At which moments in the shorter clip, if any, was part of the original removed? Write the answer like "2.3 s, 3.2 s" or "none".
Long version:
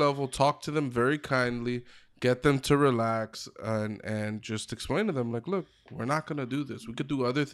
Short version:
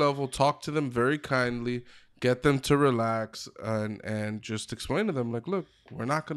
none